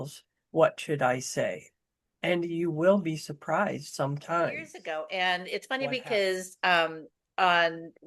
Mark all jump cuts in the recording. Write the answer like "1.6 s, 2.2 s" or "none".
4.7 s